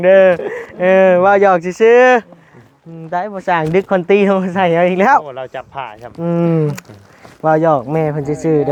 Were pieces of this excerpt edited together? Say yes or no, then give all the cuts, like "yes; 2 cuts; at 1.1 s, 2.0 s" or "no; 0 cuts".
no; 0 cuts